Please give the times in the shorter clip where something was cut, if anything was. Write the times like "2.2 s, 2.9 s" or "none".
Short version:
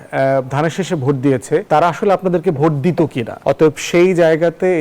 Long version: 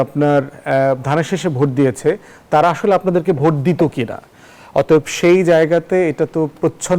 1.6 s, 3.3 s